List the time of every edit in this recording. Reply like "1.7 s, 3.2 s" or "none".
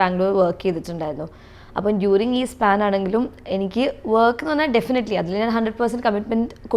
none